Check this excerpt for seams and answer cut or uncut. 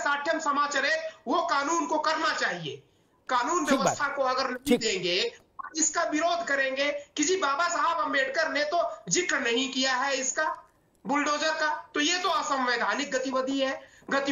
cut